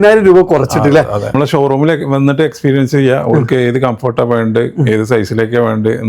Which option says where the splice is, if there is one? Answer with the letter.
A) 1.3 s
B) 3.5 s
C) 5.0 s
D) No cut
A